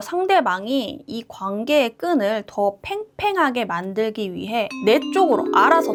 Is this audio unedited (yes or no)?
yes